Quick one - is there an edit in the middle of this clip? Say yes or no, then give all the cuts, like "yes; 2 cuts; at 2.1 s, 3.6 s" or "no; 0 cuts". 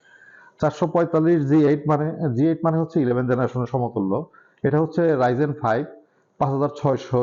no; 0 cuts